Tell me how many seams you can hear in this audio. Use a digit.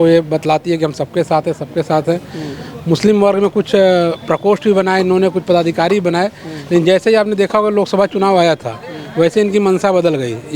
0